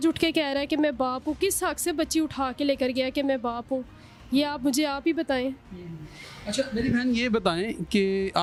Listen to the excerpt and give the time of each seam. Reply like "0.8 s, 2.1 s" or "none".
none